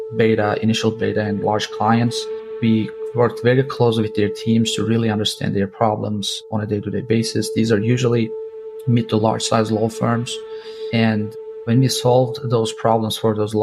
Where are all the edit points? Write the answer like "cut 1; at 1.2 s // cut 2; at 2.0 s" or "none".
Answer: none